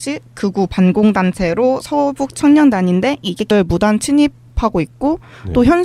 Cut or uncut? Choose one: uncut